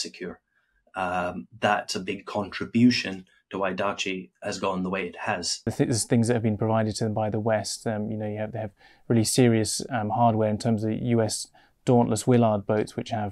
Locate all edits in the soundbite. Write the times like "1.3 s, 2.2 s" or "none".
5.7 s